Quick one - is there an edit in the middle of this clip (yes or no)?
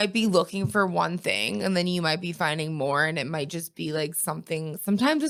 no